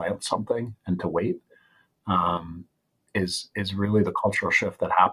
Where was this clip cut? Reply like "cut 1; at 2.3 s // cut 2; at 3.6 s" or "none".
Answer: none